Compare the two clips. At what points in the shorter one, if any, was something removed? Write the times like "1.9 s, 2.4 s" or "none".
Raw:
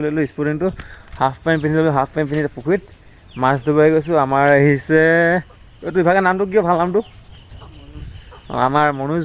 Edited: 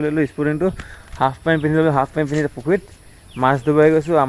none

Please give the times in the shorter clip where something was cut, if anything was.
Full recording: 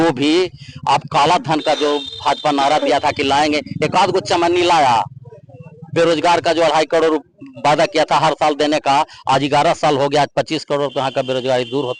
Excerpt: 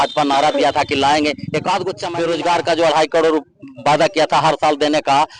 2.0 s

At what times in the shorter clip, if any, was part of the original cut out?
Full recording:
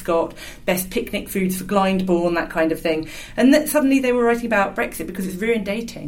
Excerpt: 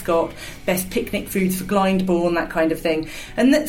none

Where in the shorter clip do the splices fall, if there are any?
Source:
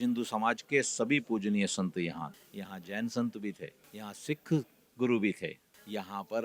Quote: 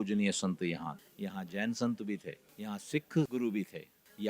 3.3 s

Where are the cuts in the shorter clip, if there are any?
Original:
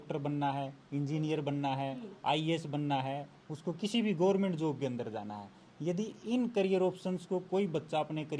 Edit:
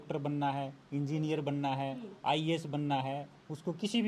none

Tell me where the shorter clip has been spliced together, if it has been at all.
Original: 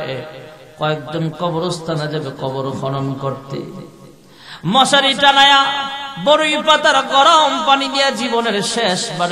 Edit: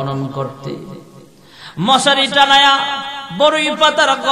none

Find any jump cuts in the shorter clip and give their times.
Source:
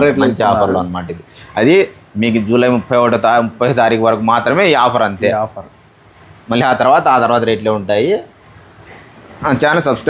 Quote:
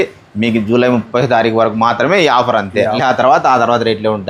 1.1 s, 3.0 s

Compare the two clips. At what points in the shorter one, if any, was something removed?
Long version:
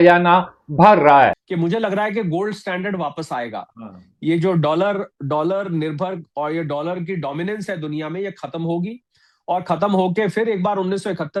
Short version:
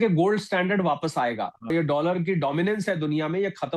1.7 s

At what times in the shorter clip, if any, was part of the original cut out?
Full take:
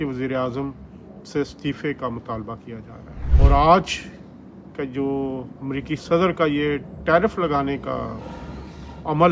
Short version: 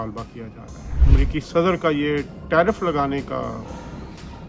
1.0 s

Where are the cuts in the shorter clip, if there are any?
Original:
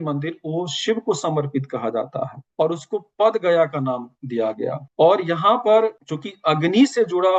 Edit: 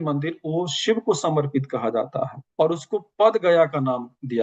none

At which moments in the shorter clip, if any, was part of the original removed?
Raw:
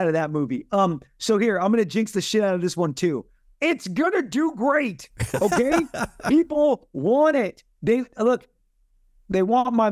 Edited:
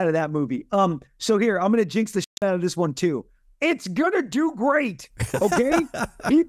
none

